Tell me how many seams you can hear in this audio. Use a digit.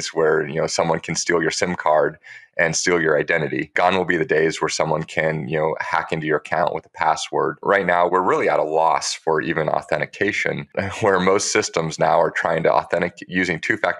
3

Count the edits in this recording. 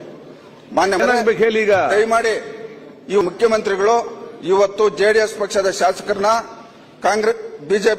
2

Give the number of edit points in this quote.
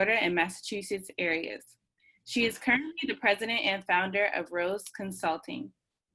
0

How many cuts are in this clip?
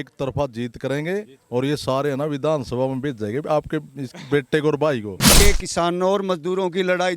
1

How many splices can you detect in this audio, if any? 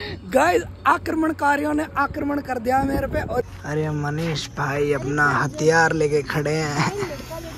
1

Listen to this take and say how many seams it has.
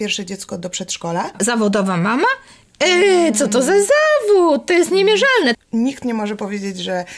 2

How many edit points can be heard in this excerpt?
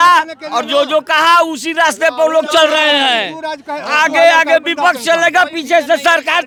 0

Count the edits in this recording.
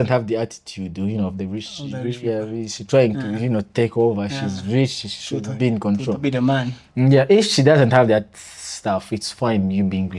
0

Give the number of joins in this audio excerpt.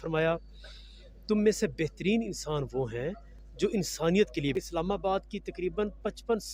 1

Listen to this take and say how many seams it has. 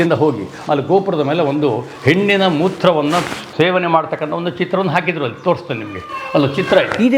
1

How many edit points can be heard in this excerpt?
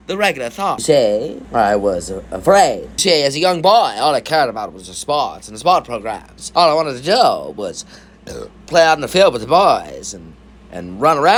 0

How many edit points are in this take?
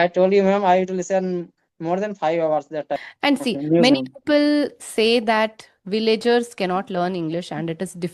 1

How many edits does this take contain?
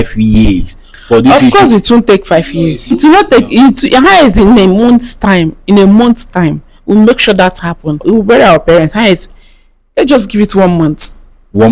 2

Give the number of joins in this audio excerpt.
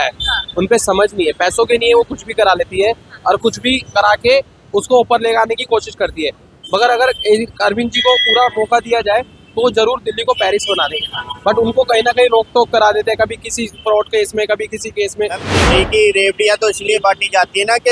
1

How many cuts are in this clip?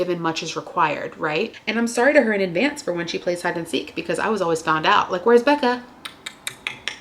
1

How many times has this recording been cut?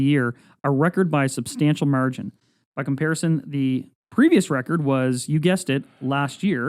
0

